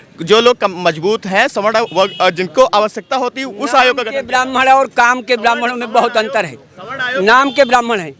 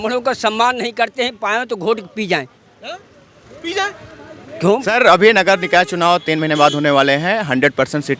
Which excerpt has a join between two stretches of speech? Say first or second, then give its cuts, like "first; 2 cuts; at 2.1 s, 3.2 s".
second; 1 cut; at 4.7 s